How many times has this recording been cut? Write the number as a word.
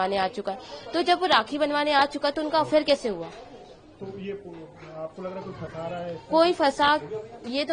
zero